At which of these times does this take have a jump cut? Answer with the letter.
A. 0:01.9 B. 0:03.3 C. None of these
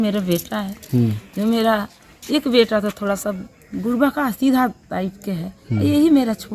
C